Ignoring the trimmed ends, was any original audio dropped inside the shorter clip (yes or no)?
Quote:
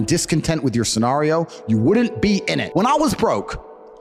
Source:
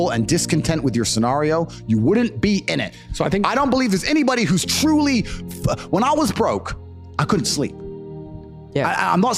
yes